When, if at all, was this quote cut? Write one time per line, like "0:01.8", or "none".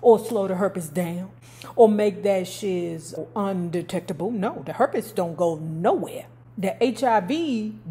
0:03.2